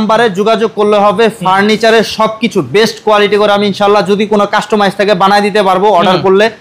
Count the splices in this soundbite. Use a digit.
0